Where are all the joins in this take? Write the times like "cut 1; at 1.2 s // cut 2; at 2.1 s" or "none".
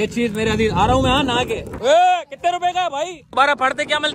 cut 1; at 1.7 s // cut 2; at 3.3 s